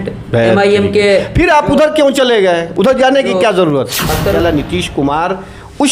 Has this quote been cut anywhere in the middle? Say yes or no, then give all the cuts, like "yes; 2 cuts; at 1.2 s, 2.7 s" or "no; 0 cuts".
yes; 1 cut; at 4.4 s